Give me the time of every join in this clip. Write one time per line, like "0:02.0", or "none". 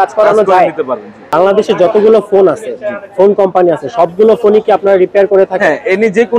0:01.2